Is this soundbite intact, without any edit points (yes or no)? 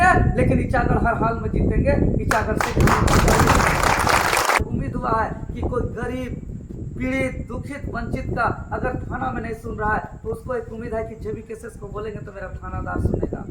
no